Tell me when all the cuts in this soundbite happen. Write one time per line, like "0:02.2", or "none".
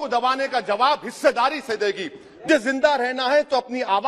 0:02.5